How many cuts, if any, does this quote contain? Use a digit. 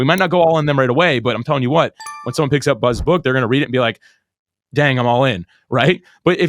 0